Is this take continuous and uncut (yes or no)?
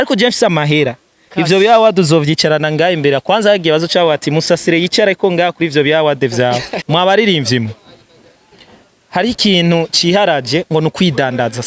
no